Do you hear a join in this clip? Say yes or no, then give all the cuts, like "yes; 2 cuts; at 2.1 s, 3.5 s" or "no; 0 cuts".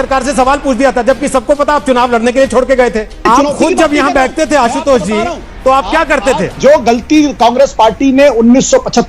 yes; 2 cuts; at 3.2 s, 6.6 s